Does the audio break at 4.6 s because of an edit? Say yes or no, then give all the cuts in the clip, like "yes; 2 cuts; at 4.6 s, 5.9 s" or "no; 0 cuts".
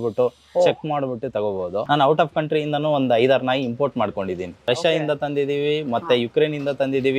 yes; 2 cuts; at 1.8 s, 4.6 s